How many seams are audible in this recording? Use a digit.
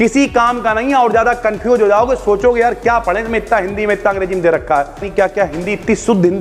1